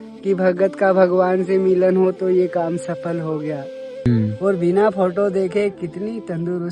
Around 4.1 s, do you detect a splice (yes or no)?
yes